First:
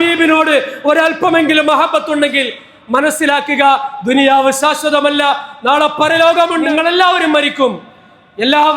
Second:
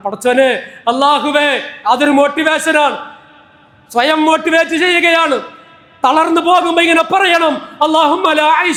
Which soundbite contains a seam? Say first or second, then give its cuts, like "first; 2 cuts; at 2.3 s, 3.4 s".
first; 1 cut; at 6.7 s